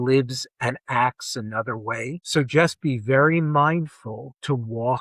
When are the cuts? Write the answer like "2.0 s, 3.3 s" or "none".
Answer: none